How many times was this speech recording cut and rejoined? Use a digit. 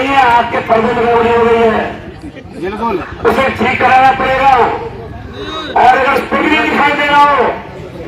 0